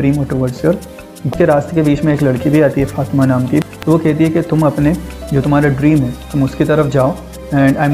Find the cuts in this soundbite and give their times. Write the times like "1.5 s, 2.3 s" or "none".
1.3 s, 3.7 s